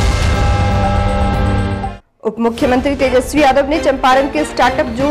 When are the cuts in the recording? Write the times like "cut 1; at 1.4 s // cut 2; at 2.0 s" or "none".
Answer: none